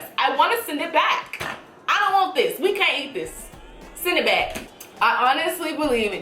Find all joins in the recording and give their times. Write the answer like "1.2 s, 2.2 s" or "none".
4.8 s